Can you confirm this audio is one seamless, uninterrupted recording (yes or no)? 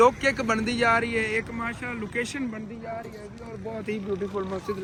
yes